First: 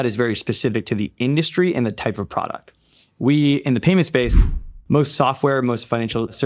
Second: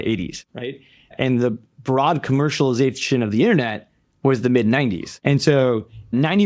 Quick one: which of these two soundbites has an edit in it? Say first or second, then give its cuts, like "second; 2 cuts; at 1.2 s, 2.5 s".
first; 1 cut; at 4.4 s